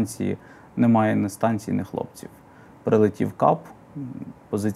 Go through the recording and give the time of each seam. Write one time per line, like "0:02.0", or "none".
none